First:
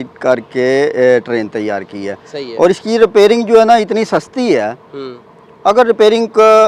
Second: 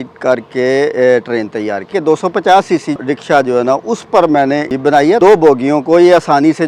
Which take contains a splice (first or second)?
second